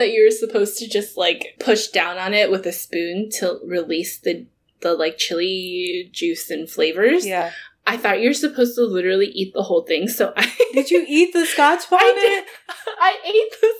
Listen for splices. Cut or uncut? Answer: cut